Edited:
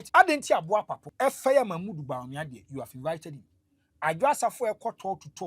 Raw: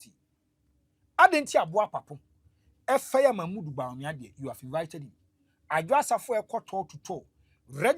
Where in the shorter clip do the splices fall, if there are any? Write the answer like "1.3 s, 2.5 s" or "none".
1.0 s